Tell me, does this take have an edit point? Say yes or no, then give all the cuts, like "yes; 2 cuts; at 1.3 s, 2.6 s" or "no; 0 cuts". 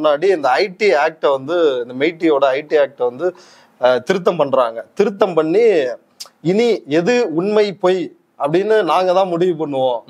no; 0 cuts